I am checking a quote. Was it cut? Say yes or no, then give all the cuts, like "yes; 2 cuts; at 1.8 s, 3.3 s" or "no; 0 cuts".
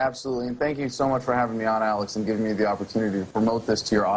no; 0 cuts